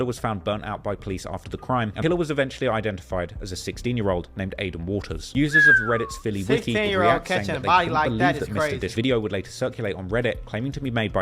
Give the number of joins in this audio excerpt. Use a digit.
2